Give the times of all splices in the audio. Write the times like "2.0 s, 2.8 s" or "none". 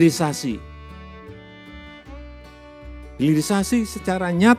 0.9 s, 2.4 s